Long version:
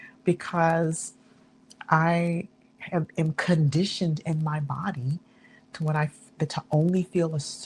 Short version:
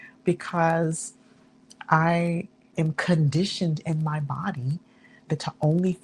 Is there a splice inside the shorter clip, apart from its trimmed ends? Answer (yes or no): yes